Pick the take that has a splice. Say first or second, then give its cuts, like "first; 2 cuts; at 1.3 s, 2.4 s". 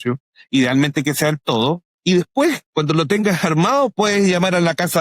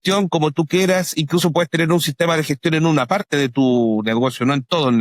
first; 2 cuts; at 1.9 s, 2.6 s